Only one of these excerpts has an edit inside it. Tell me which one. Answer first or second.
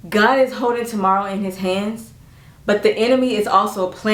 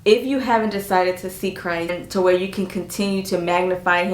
second